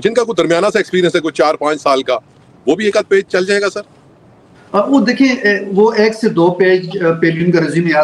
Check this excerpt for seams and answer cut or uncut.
uncut